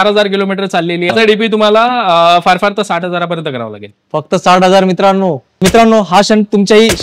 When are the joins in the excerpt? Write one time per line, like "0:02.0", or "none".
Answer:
0:01.1
0:05.6